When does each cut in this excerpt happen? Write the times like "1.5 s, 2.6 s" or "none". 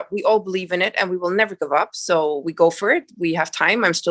none